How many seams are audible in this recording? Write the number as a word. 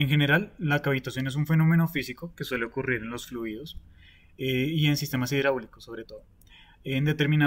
one